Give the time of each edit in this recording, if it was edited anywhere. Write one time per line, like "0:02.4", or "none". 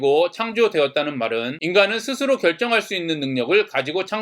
0:01.6